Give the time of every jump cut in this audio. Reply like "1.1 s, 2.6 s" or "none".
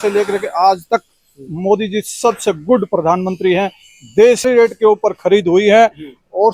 none

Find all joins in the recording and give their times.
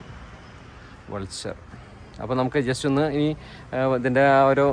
none

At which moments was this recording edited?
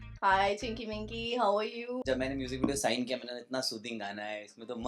2.0 s

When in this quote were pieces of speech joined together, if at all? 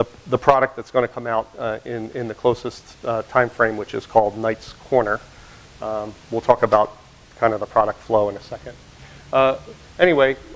5.9 s

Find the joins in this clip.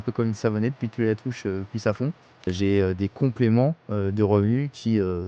2.5 s

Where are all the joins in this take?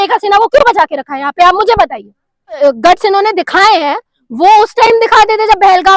2.6 s

